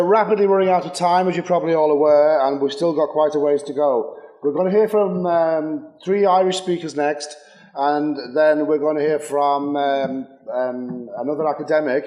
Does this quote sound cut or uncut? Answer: cut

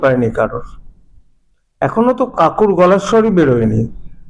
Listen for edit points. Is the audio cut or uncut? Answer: uncut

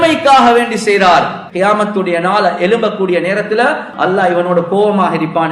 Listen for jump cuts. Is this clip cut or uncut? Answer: cut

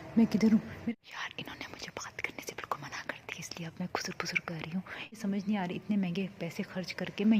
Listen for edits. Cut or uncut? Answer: cut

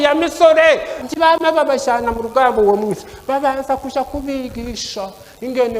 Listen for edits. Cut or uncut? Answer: cut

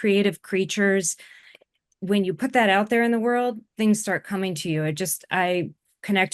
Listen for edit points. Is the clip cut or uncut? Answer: cut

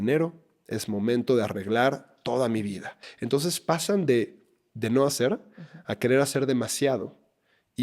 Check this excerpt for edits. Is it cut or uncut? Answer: cut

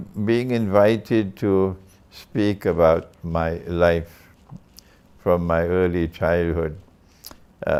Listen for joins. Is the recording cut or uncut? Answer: uncut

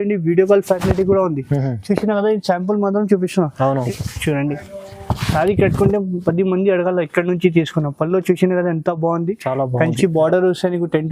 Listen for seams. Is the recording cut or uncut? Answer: cut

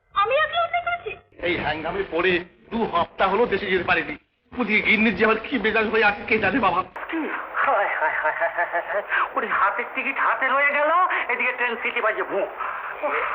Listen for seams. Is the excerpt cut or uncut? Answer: cut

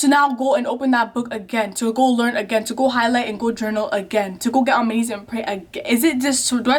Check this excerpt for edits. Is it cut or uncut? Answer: uncut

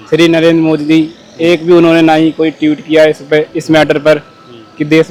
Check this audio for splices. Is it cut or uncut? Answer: uncut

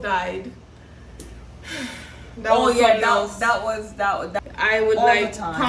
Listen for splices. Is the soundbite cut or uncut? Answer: cut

